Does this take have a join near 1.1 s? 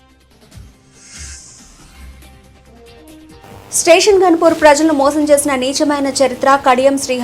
no; 1 cut; at 3.7 s

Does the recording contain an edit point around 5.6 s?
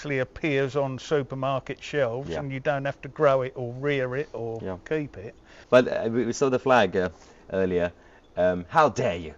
yes; 1 cut; at 5.6 s

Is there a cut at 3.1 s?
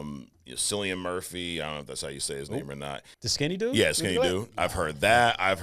yes; 1 cut; at 3.1 s

